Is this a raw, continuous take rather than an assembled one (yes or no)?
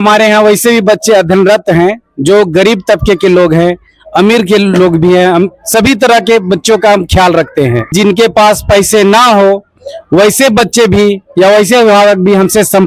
no